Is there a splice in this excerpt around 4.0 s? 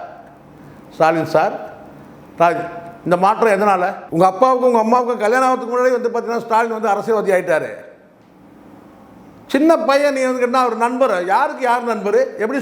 yes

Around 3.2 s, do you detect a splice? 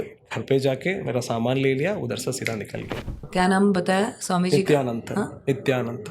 yes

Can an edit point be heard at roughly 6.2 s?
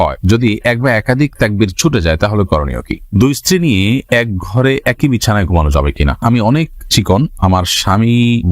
yes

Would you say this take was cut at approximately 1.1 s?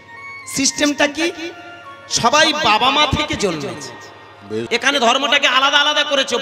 no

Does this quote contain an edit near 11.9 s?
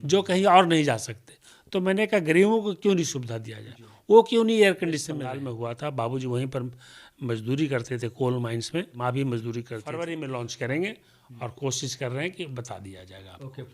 no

